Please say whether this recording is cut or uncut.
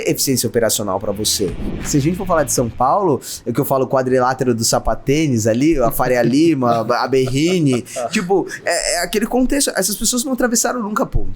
cut